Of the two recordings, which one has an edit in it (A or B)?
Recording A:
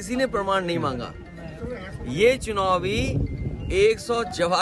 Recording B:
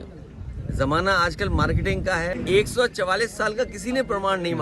B